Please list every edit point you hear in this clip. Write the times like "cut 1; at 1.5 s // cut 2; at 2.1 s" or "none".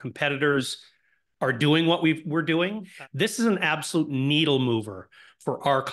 cut 1; at 2.9 s